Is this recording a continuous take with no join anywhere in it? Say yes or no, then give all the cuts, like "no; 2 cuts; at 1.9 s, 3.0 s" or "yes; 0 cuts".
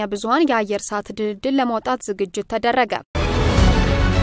no; 1 cut; at 3.1 s